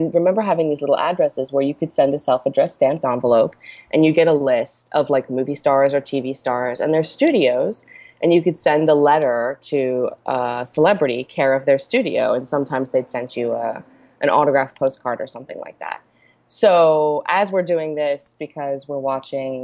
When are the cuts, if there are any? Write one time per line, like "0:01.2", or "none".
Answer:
none